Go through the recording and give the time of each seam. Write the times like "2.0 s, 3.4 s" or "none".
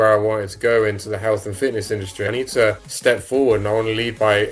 2.9 s